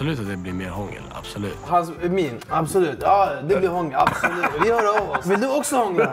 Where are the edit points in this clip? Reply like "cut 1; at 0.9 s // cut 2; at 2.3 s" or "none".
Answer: cut 1; at 1.6 s // cut 2; at 4.5 s // cut 3; at 5.2 s